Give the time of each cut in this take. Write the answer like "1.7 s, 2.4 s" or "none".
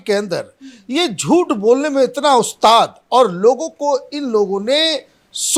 none

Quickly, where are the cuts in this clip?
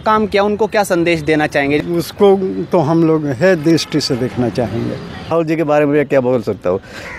1.8 s, 5.3 s

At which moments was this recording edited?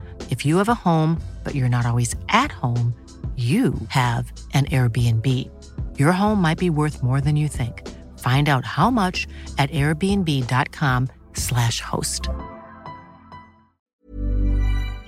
13.9 s

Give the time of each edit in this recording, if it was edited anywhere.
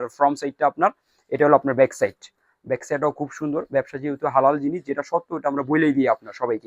none

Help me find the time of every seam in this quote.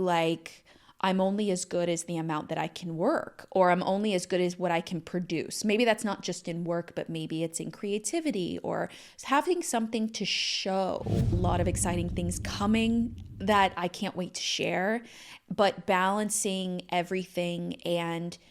11.4 s

